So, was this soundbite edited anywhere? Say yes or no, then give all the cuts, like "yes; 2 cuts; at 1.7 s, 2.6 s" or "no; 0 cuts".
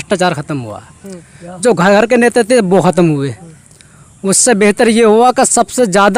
no; 0 cuts